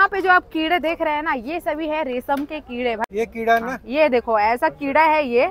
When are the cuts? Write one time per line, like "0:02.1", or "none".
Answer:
0:03.0